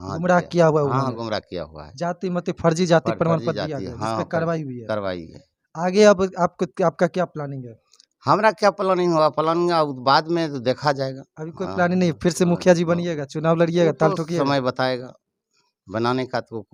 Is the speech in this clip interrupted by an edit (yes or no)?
no